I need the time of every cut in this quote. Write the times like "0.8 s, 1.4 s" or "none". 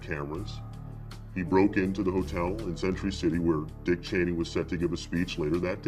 4.1 s